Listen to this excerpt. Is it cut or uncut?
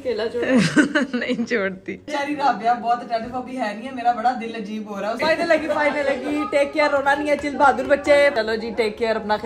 cut